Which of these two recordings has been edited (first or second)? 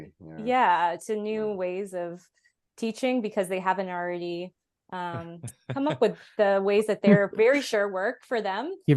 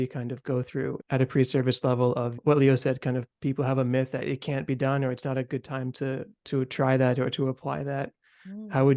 second